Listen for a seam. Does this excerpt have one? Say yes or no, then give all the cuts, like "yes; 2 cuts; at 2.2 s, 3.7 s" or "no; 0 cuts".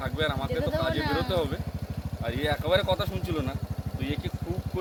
no; 0 cuts